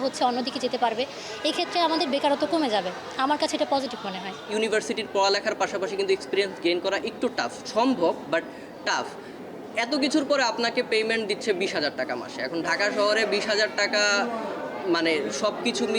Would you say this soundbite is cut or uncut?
uncut